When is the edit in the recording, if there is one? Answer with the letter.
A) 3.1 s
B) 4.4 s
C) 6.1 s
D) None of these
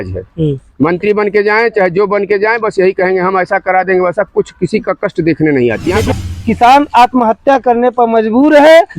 C